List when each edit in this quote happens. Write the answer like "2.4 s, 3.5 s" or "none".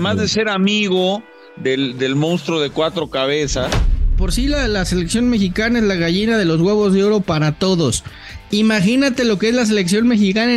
4.1 s